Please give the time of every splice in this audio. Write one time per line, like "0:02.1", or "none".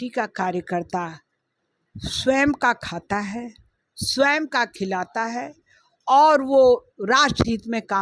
none

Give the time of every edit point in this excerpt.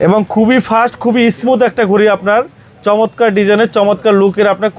none

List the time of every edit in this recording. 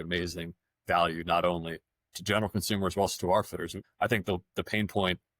0:03.8

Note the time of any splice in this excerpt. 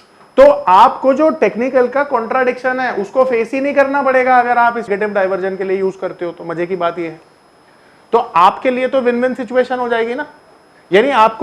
0:04.9

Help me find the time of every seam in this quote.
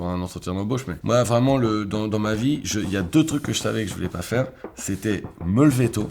0:00.9

